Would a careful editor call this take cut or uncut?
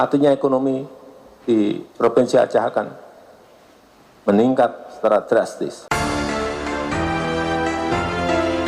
cut